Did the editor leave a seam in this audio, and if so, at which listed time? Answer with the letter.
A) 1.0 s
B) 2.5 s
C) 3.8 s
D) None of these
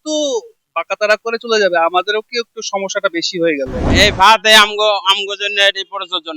C